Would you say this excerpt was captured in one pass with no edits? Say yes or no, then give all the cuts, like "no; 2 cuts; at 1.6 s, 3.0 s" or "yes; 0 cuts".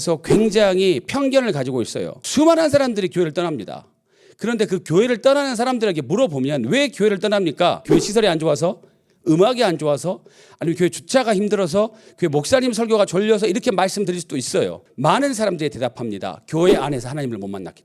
no; 3 cuts; at 2.4 s, 7.8 s, 14.8 s